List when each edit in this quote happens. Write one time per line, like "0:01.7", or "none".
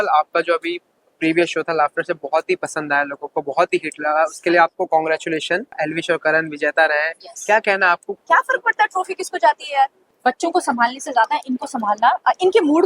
0:05.8
0:08.1
0:10.1